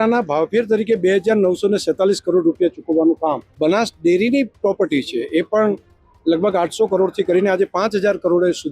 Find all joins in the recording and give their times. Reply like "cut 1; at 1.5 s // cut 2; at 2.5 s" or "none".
cut 1; at 3.5 s